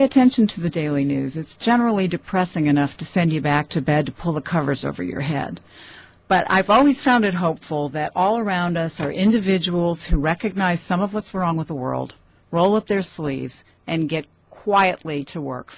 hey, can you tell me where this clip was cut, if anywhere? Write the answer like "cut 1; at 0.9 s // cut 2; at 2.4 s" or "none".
cut 1; at 5.5 s